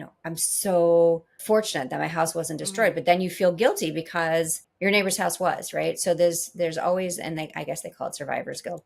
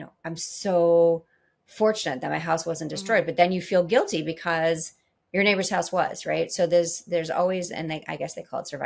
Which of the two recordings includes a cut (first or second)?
first